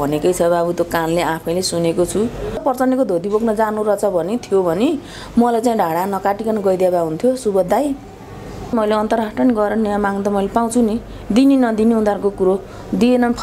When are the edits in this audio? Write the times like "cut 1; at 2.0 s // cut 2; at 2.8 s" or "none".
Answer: cut 1; at 2.6 s // cut 2; at 8.7 s